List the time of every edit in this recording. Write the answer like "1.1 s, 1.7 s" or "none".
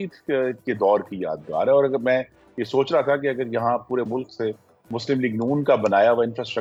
none